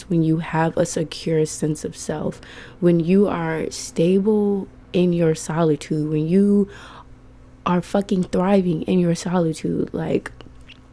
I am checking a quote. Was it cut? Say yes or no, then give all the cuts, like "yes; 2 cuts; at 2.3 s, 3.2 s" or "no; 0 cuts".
no; 0 cuts